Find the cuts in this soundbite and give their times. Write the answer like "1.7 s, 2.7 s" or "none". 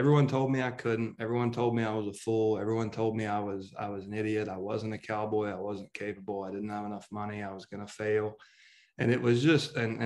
none

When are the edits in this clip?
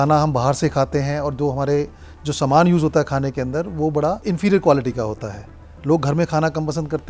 4.2 s

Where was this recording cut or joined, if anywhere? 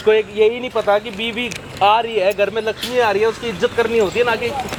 none

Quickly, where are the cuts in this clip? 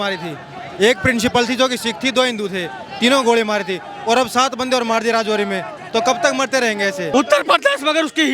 7.1 s

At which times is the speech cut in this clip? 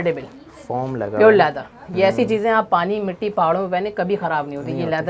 none

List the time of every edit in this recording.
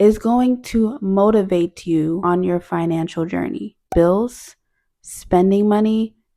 2.2 s, 3.8 s

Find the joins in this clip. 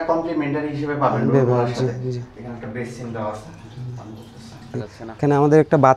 5.0 s

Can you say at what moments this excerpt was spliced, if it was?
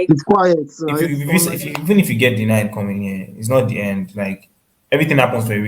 1.1 s

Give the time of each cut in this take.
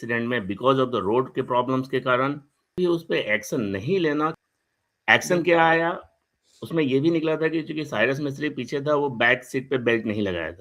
2.7 s, 4.3 s

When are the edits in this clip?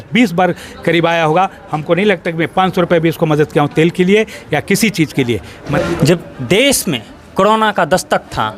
5.6 s

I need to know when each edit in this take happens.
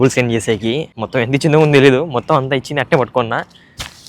0.9 s

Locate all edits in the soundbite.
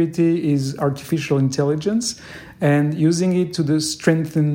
none

